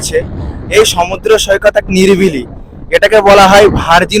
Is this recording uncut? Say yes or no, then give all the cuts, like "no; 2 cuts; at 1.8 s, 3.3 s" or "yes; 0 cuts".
yes; 0 cuts